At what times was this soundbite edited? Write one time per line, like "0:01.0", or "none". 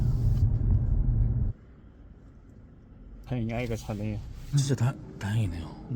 0:03.3
0:04.5